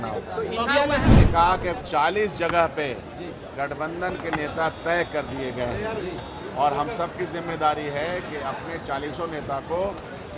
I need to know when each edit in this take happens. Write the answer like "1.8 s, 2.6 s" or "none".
1.0 s